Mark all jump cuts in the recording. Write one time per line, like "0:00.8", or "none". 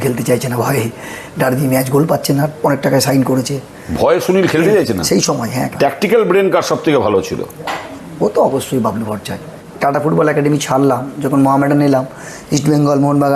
0:05.7
0:09.6